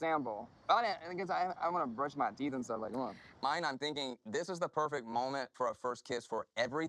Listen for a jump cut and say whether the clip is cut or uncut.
cut